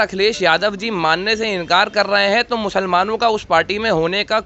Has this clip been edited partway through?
no; 0 cuts

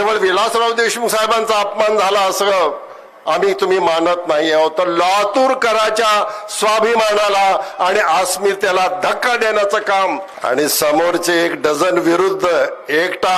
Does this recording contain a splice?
yes; 1 cut; at 10.3 s

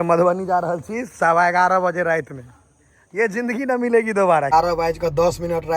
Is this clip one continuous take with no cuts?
no; 1 cut; at 4.5 s

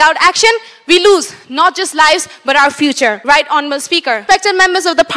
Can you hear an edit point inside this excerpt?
yes; 2 cuts; at 3.2 s, 4.2 s

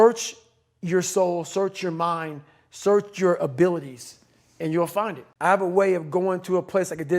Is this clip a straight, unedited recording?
no; 1 cut; at 5.3 s

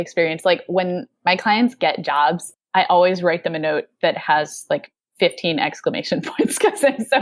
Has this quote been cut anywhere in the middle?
yes; 1 cut; at 2.5 s

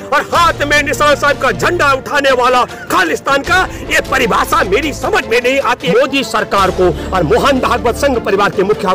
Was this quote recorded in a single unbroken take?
no; 1 cut; at 5.8 s

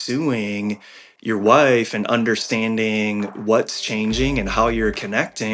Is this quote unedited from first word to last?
yes; 0 cuts

